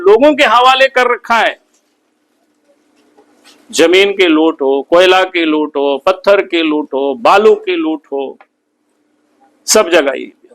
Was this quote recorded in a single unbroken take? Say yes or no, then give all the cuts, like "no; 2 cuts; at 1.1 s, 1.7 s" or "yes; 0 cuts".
yes; 0 cuts